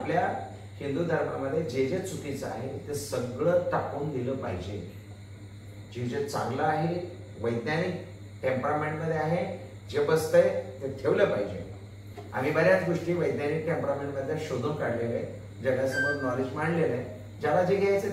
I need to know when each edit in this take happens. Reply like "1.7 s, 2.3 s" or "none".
none